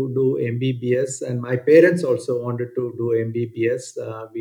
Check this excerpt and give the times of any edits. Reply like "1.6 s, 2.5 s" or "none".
none